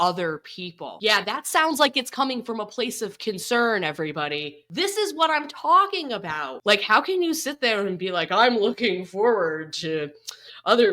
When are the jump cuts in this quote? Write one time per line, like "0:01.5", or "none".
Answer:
0:06.5